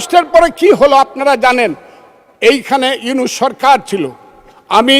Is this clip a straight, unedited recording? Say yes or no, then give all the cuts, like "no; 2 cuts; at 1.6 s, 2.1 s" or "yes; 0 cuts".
yes; 0 cuts